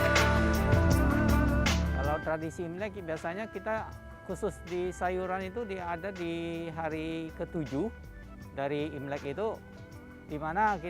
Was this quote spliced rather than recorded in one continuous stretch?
yes; 1 cut; at 2.0 s

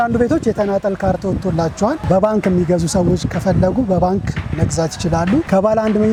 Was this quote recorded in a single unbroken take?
yes; 0 cuts

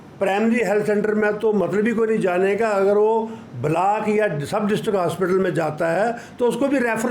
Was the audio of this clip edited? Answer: no; 0 cuts

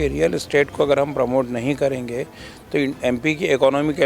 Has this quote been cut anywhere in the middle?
no; 0 cuts

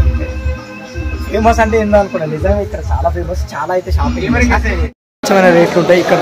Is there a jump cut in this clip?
yes; 1 cut; at 4.8 s

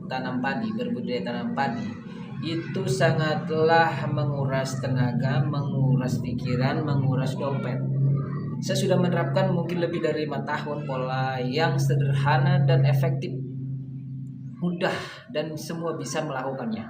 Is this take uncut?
no; 2 cuts; at 8.5 s, 14.6 s

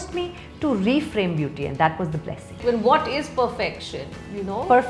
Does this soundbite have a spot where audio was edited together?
yes; 1 cut; at 2.6 s

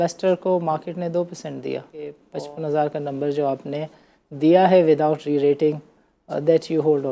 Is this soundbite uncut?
no; 1 cut; at 2.2 s

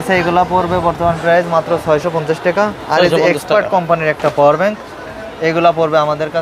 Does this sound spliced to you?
no; 0 cuts

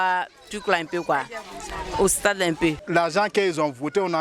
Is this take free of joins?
no; 1 cut; at 2.8 s

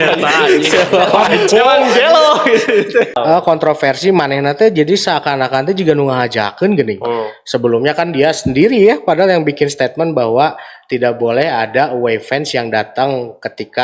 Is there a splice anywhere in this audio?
yes; 1 cut; at 3.2 s

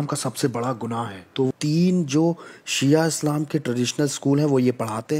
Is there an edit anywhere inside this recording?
yes; 1 cut; at 1.5 s

